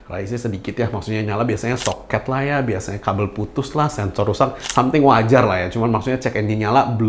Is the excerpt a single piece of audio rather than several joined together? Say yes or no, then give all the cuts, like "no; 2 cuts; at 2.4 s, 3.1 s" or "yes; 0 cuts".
yes; 0 cuts